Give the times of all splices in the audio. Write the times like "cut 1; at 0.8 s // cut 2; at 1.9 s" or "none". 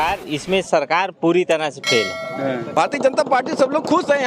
cut 1; at 2.7 s